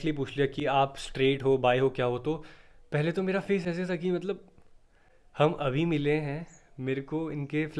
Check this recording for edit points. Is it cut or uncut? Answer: uncut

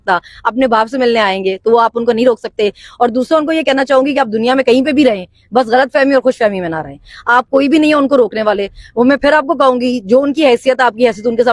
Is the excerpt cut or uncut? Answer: uncut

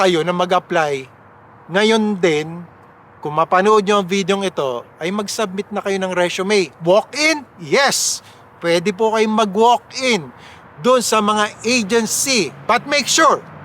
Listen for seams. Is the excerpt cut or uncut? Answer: uncut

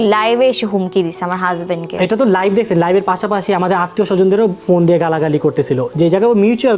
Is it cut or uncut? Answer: uncut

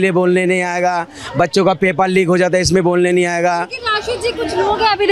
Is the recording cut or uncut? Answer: uncut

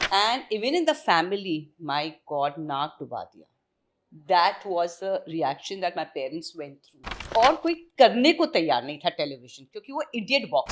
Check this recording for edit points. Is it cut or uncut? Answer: cut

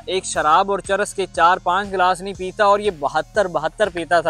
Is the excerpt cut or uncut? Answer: uncut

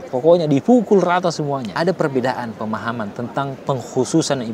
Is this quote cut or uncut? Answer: cut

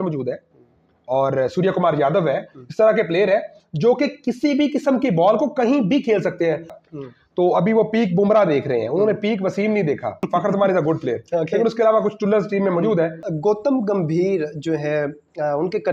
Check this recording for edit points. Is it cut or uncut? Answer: cut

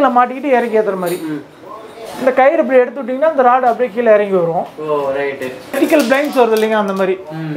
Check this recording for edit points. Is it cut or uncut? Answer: cut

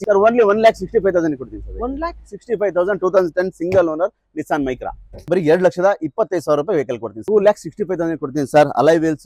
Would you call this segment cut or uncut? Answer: cut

